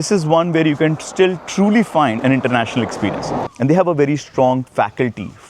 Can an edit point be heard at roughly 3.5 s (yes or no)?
yes